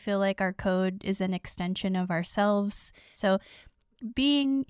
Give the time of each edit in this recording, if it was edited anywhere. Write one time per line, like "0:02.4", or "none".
0:03.1

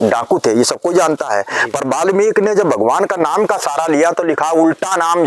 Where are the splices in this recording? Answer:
none

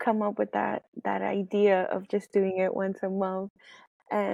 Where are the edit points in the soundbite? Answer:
none

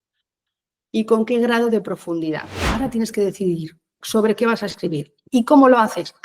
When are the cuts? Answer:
0:02.6

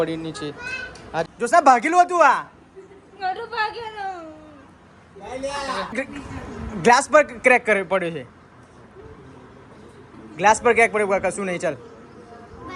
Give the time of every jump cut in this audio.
0:01.3

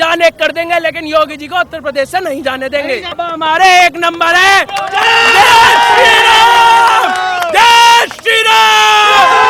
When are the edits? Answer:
0:03.1

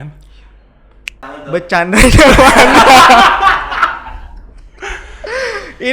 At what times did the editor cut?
0:01.2

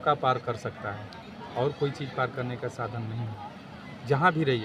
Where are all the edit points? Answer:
none

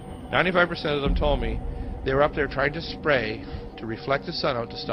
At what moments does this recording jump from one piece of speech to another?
0:02.3

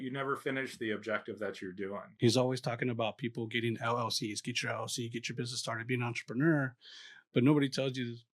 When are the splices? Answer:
0:02.1

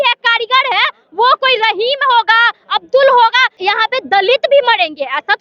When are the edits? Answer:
0:03.5

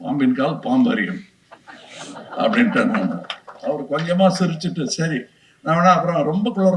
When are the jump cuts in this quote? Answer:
none

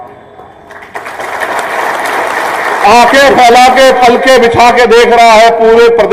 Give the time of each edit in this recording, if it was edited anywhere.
none

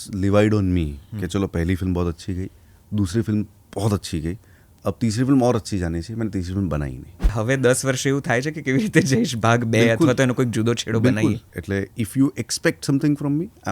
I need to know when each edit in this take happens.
0:07.4
0:11.5

